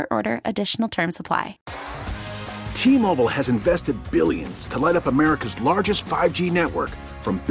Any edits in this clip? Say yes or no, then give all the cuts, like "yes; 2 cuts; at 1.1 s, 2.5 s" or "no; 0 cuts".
yes; 1 cut; at 1.6 s